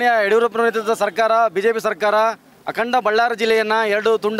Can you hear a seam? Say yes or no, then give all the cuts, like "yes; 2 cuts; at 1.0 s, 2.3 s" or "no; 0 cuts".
no; 0 cuts